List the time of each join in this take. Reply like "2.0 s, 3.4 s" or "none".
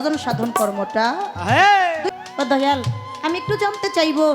2.1 s

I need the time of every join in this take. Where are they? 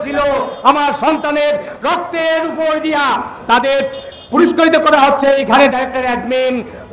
none

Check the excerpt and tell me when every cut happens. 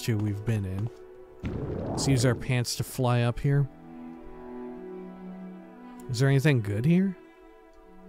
none

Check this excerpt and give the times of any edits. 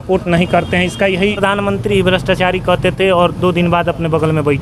1.4 s

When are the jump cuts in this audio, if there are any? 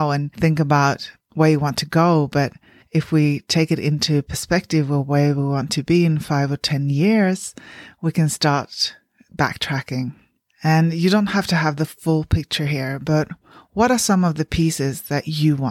none

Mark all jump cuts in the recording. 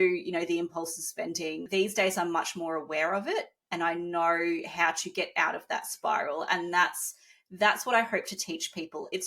1.6 s

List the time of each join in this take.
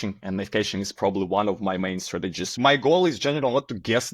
2.5 s

